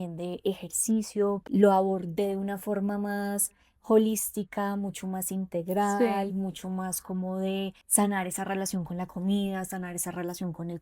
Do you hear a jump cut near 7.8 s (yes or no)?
yes